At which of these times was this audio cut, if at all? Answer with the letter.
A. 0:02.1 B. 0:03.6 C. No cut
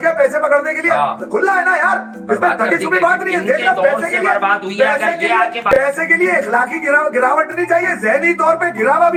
C